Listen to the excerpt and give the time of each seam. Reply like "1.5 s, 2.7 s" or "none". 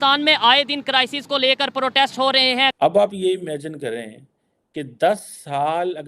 2.7 s

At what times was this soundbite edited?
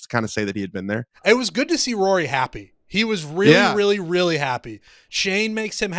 1.1 s

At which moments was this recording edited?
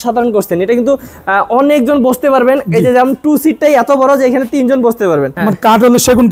5.3 s

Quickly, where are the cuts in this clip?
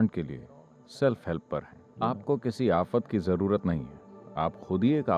1.8 s

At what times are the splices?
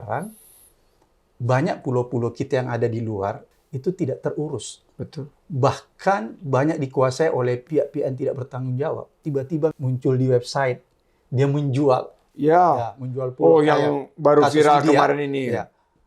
3.4 s, 7.6 s, 9.3 s

